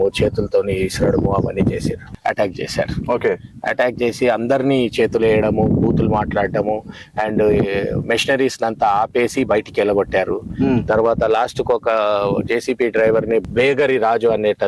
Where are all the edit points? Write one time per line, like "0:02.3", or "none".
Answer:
0:02.1
0:13.5

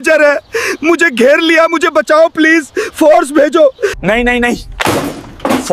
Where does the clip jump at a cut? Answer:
0:04.0

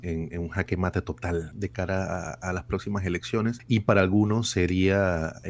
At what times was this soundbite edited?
0:01.5
0:03.6

